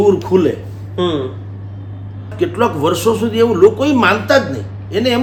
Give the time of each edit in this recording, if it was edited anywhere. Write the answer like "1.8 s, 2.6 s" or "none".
none